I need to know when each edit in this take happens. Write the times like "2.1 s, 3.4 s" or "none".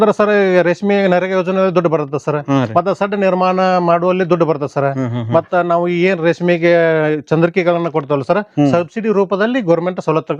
none